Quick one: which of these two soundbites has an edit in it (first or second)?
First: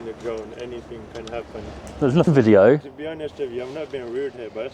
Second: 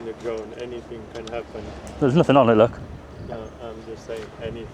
first